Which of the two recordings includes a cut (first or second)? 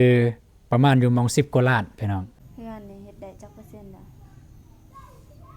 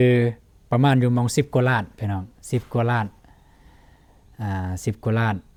first